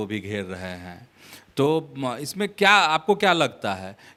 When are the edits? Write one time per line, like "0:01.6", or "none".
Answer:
none